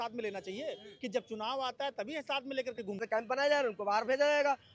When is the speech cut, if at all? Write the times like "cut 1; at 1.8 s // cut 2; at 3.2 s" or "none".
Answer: cut 1; at 3.0 s